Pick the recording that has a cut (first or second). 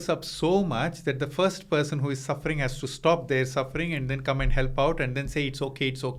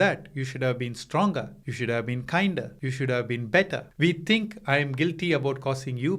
second